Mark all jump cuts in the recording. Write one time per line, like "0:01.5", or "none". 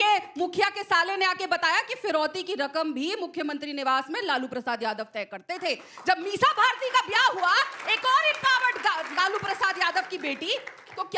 none